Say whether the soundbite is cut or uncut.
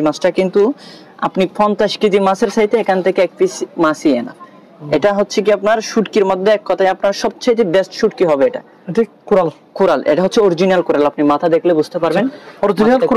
uncut